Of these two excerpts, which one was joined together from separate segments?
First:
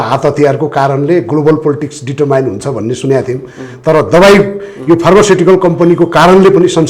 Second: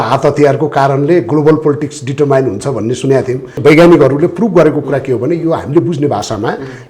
second; 1 cut; at 3.6 s

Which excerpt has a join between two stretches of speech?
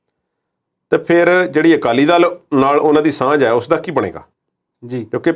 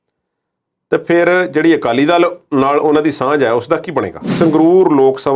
second; 1 cut; at 4.3 s

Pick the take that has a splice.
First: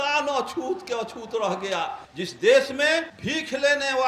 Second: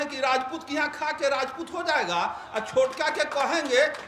first; 2 cuts; at 2.0 s, 3.2 s

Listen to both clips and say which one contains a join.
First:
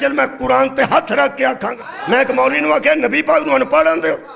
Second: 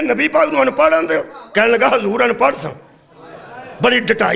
first; 1 cut; at 1.7 s

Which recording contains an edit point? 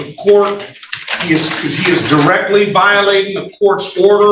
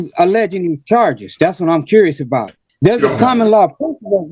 second; 1 cut; at 2.6 s

